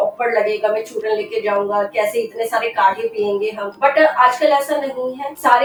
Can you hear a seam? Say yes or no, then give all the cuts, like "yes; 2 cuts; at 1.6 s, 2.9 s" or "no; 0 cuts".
no; 0 cuts